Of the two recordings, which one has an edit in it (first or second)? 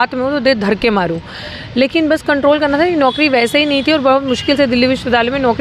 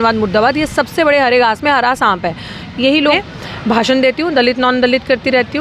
second